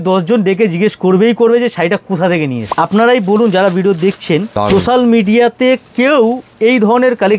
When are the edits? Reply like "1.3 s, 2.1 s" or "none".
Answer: 2.7 s, 4.5 s

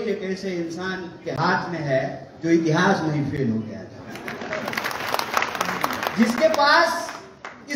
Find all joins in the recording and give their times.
4.8 s

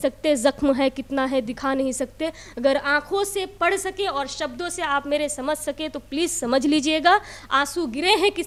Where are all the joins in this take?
none

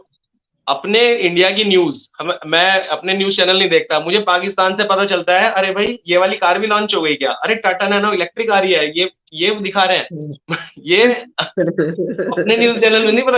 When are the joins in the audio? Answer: none

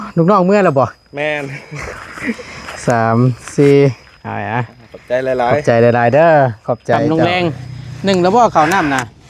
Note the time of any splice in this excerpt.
7.0 s

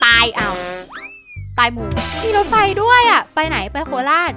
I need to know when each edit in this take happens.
2.1 s

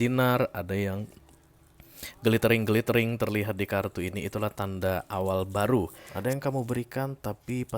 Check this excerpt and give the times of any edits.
6.0 s

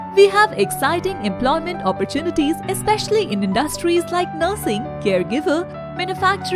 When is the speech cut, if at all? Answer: none

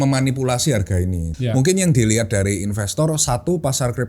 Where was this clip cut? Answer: 1.3 s

